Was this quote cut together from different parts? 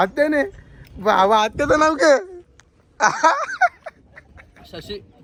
no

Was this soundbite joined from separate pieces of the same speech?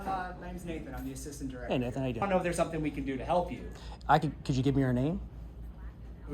yes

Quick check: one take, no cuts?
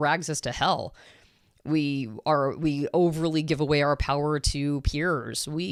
yes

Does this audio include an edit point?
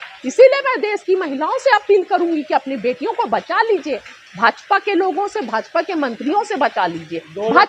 no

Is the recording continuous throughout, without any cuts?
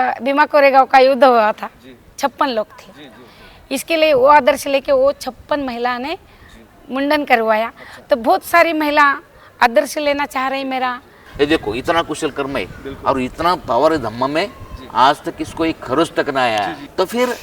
no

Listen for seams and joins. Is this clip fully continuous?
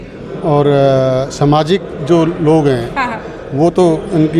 yes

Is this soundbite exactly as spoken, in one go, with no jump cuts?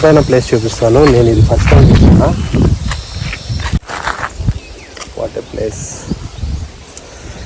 no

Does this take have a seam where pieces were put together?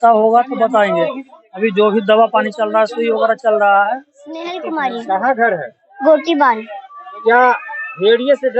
yes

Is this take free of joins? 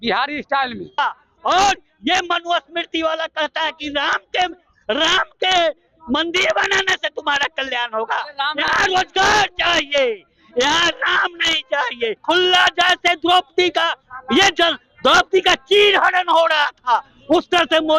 no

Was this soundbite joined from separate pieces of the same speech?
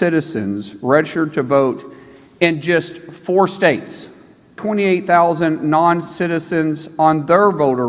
yes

